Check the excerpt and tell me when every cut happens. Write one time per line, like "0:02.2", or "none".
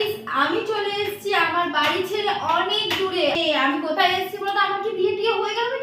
none

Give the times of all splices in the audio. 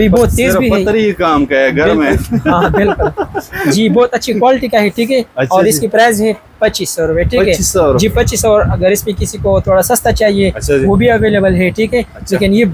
none

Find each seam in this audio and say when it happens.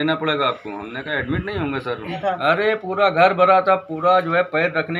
0:02.2

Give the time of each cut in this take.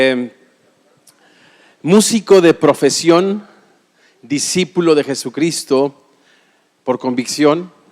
0:04.9

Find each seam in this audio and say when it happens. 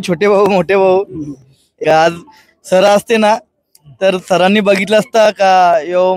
0:01.7

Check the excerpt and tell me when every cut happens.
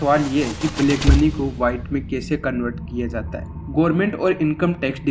none

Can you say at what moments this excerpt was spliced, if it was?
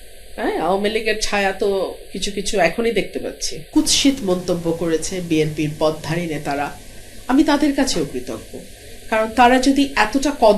0:03.6

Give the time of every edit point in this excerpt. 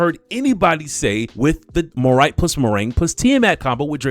0:01.6

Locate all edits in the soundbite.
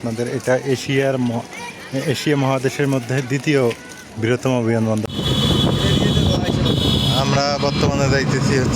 0:05.1

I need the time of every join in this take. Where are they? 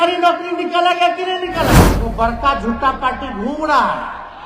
0:01.9

